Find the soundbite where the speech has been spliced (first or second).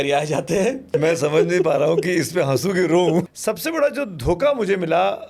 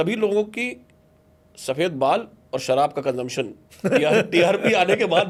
first